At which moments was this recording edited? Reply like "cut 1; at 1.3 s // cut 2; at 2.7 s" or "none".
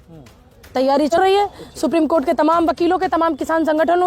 cut 1; at 1.2 s